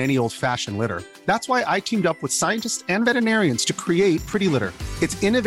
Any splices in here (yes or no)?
no